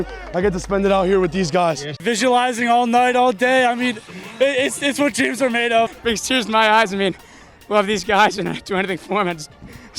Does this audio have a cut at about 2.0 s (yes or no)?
yes